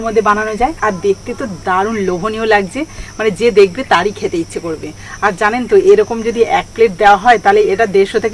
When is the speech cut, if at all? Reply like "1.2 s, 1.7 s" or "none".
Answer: none